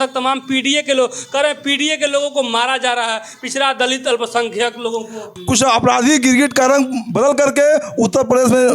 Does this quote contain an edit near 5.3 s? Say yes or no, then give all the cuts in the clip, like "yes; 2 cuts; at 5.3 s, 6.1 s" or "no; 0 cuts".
yes; 1 cut; at 5.3 s